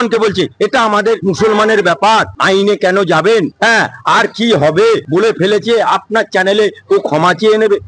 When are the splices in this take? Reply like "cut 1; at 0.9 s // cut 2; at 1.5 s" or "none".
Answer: cut 1; at 1.2 s // cut 2; at 5.0 s